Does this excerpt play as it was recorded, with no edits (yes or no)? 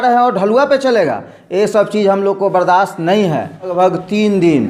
no